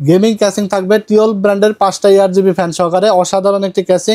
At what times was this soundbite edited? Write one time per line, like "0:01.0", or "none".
none